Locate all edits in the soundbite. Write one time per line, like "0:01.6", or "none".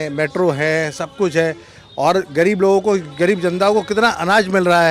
none